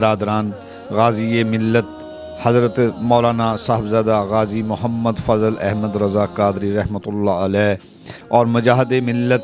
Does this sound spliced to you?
no; 0 cuts

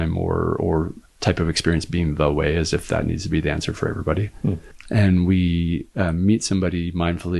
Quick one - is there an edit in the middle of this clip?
yes; 2 cuts; at 1.0 s, 4.7 s

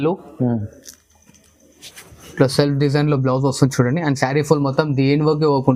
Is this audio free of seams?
yes; 0 cuts

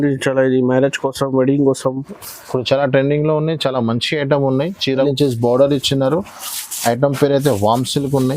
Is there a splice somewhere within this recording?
yes; 1 cut; at 5.1 s

